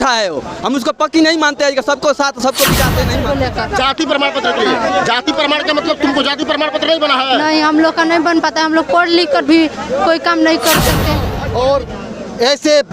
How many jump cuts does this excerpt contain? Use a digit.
2